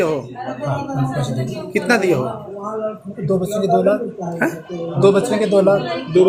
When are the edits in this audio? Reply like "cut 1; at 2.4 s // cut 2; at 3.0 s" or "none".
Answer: none

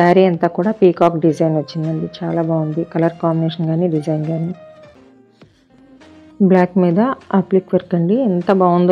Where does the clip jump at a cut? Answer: cut 1; at 4.9 s

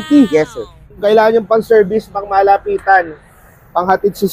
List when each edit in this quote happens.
cut 1; at 0.9 s

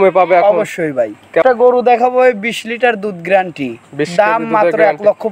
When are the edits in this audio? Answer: cut 1; at 1.4 s

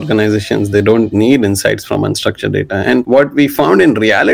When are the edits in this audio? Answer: cut 1; at 3.1 s

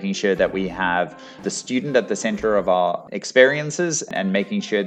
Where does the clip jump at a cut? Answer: cut 1; at 1.4 s // cut 2; at 3.0 s // cut 3; at 4.1 s

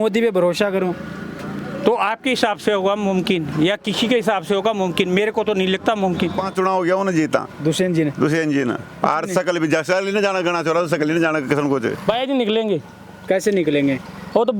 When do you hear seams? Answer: cut 1; at 6.4 s // cut 2; at 12.0 s

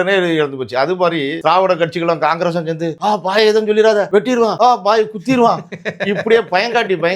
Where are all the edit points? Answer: cut 1; at 1.3 s // cut 2; at 2.9 s // cut 3; at 4.3 s

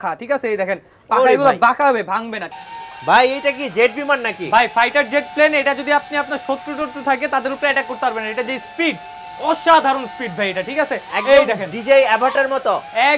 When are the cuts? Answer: cut 1; at 2.4 s

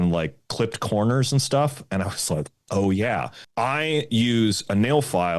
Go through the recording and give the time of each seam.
cut 1; at 3.4 s

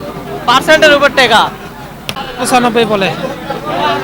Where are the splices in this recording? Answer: cut 1; at 2.3 s

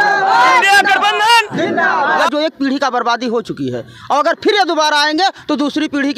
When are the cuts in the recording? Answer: cut 1; at 2.3 s

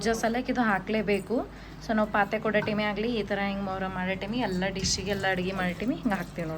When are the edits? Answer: none

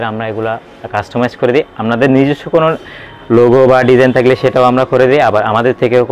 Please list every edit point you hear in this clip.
none

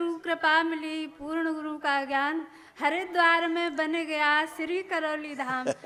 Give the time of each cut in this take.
none

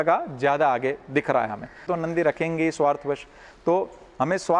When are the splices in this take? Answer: cut 1; at 1.9 s

